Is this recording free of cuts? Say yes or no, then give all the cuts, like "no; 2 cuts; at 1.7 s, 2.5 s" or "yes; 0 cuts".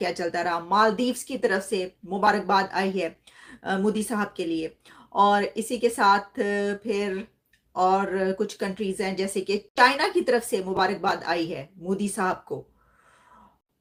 yes; 0 cuts